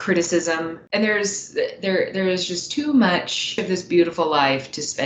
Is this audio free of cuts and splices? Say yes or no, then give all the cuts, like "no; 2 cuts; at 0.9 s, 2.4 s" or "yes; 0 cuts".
no; 2 cuts; at 0.8 s, 3.6 s